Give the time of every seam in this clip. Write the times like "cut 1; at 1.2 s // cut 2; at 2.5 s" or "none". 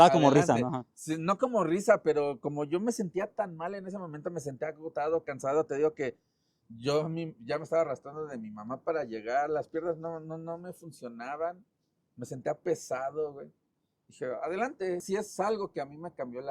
cut 1; at 15.0 s